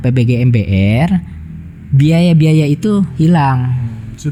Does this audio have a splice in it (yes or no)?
no